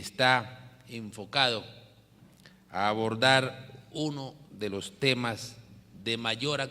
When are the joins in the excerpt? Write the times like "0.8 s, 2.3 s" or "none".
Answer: 1.5 s